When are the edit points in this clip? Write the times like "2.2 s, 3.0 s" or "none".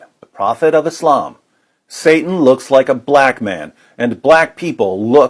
none